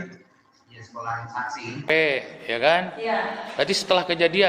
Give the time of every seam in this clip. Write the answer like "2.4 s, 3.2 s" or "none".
1.9 s